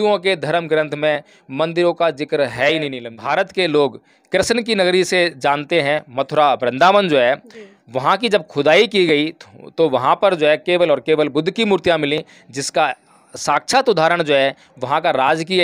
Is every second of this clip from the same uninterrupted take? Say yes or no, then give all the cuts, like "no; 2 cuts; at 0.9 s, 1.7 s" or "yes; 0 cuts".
no; 1 cut; at 3.1 s